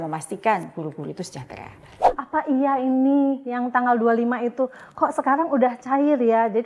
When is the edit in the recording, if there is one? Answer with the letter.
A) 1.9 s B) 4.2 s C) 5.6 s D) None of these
A